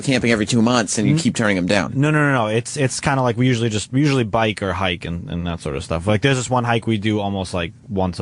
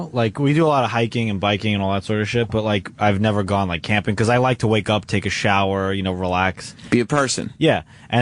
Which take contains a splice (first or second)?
second